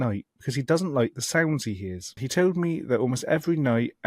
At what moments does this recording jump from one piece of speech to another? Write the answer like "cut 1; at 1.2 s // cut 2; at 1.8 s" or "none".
cut 1; at 2.2 s